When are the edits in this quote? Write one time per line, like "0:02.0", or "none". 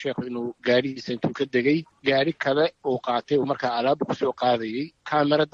none